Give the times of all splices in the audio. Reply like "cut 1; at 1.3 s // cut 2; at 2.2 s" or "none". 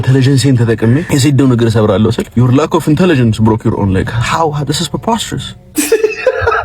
cut 1; at 1.1 s // cut 2; at 2.2 s